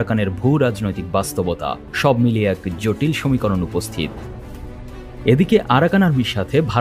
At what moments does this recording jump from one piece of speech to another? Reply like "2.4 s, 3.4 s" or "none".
1.9 s